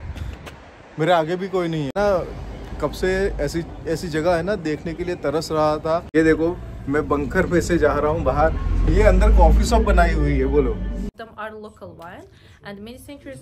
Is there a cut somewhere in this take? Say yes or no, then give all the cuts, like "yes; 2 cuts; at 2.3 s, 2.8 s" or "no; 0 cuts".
yes; 3 cuts; at 1.9 s, 6.1 s, 11.2 s